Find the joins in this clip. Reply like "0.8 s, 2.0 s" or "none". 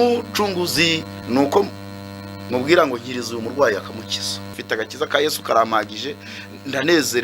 1.1 s, 4.5 s